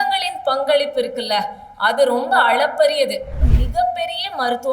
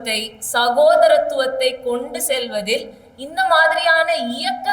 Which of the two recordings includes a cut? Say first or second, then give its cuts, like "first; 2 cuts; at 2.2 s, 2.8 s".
first; 1 cut; at 3.4 s